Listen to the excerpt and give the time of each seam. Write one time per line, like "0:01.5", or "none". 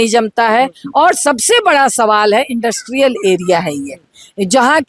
none